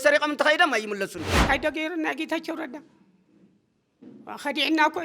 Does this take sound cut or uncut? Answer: cut